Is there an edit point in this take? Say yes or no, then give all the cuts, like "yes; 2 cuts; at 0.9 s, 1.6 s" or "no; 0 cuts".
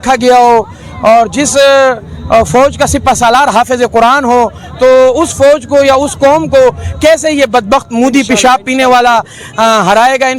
no; 0 cuts